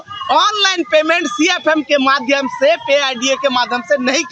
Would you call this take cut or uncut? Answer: uncut